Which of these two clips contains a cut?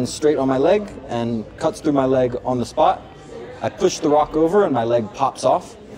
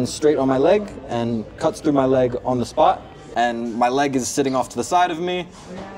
second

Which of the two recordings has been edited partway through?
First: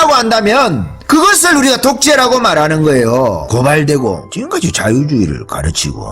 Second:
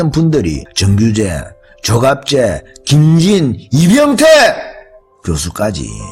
first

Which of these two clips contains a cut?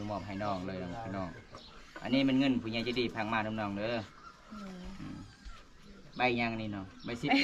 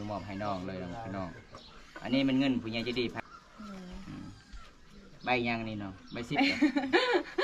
second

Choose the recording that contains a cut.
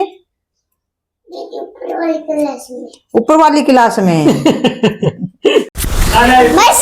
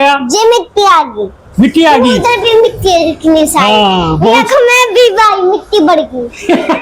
first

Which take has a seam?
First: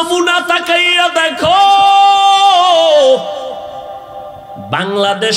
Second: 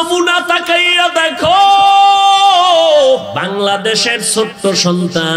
second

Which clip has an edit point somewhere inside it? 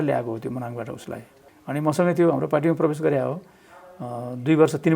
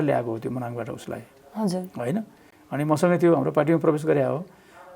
first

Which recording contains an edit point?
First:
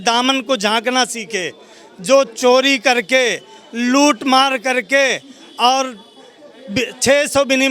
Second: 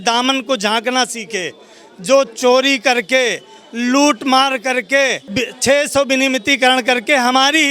second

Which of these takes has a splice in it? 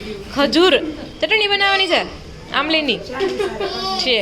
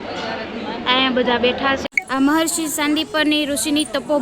second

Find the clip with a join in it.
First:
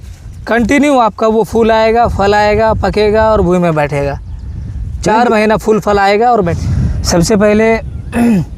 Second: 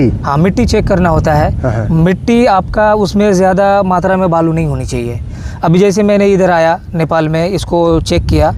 first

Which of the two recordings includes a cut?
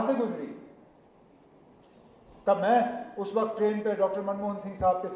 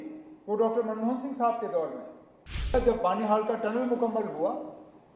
second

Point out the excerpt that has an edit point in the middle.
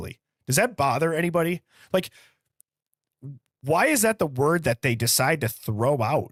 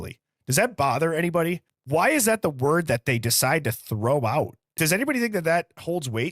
second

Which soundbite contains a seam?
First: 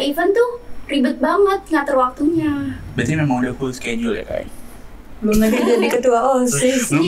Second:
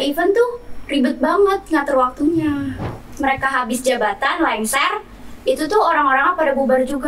second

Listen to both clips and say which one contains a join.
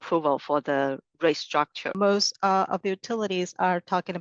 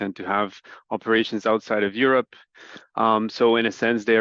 first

